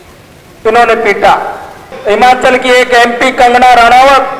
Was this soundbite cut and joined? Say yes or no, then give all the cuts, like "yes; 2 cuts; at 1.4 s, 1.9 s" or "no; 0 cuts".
yes; 1 cut; at 1.9 s